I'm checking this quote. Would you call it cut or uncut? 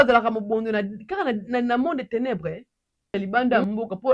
cut